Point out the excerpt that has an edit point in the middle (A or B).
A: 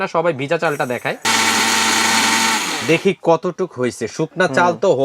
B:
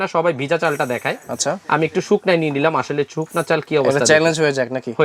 A